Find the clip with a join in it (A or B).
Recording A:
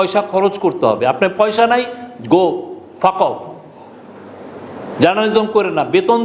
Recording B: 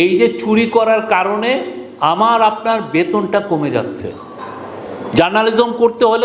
B